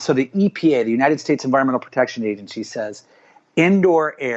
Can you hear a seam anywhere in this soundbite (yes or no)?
no